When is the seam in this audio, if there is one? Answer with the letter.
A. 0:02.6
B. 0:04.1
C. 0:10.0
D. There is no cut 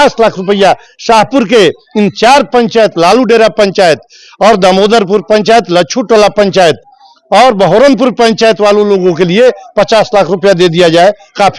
D